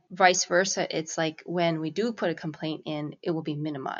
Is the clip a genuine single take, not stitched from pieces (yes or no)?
yes